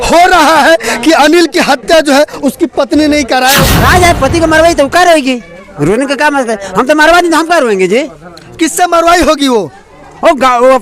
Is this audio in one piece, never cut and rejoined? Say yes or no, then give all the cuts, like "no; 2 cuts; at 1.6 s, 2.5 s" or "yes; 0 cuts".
no; 1 cut; at 3.7 s